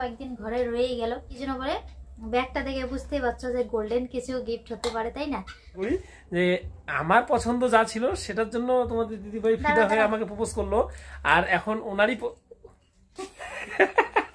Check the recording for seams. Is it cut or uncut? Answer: cut